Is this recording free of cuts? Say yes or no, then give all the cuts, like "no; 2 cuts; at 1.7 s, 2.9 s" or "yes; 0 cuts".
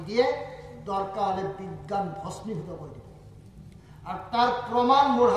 yes; 0 cuts